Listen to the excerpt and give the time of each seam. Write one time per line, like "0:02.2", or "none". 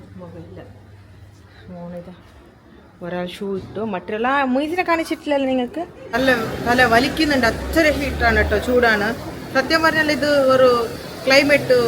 0:06.1